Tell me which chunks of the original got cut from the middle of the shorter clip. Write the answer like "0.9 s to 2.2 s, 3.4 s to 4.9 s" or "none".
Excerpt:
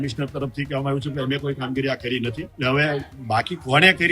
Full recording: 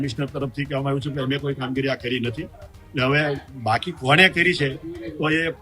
2.5 s to 2.8 s